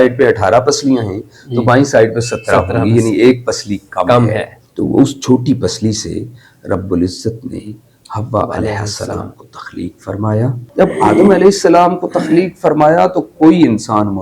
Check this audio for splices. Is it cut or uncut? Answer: cut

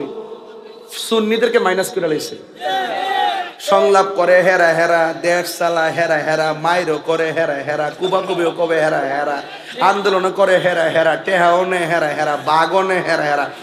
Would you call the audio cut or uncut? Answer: uncut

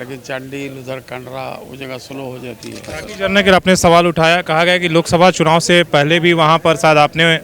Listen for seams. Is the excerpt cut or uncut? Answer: cut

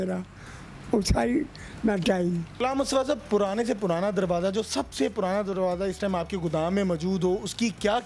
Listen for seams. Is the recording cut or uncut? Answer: cut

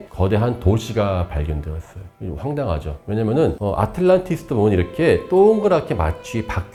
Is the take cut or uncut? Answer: uncut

